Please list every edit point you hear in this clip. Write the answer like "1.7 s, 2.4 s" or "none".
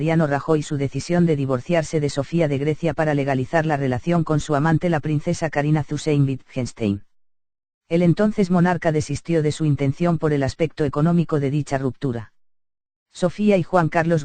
none